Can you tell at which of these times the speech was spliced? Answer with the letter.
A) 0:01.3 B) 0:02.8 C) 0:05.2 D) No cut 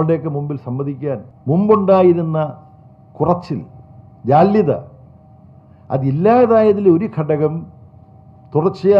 A